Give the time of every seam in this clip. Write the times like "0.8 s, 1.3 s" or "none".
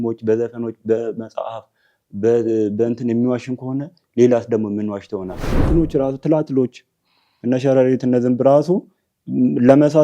5.6 s

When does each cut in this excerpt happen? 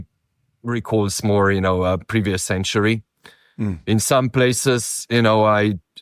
none

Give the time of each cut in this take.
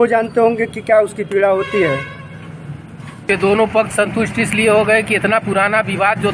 3.2 s

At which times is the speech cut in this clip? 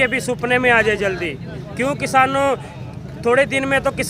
none

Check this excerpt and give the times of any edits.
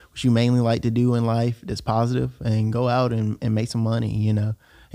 none

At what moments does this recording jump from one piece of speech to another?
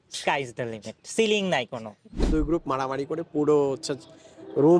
2.3 s

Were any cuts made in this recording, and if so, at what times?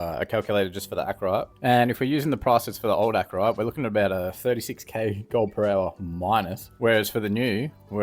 1.5 s

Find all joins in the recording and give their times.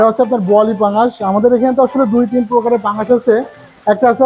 none

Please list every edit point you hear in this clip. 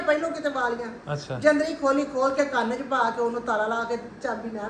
none

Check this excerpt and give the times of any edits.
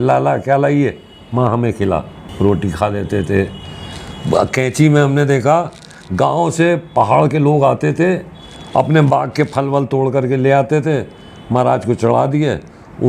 none

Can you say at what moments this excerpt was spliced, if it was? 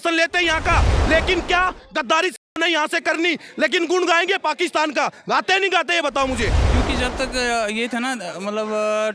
6.6 s

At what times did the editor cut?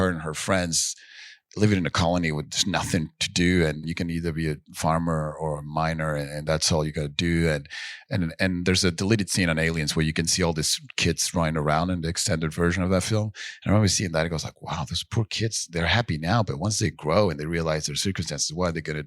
3.8 s

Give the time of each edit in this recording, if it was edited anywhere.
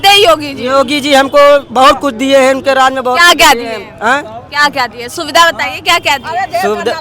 none

